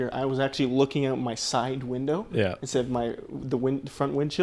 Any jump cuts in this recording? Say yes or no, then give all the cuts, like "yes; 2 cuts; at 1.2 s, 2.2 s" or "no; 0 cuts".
no; 0 cuts